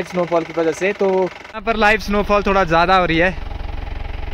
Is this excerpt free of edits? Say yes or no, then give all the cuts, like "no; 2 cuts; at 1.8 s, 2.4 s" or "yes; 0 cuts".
no; 1 cut; at 1.5 s